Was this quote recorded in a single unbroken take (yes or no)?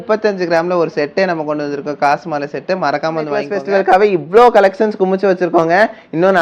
no